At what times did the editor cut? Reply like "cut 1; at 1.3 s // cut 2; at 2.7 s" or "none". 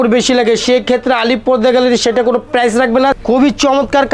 cut 1; at 3.2 s